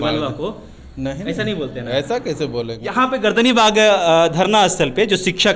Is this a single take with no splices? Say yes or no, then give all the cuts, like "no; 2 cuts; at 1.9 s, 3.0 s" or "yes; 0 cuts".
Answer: no; 1 cut; at 2.8 s